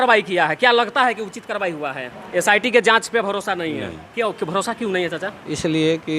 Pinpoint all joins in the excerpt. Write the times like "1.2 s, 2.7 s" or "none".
2.1 s